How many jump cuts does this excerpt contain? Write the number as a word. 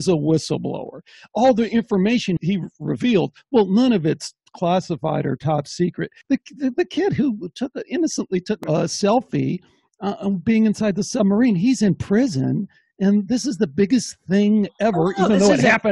three